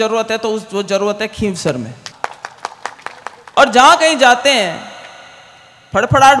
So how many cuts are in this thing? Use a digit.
1